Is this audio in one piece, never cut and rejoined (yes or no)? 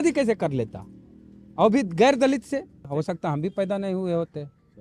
no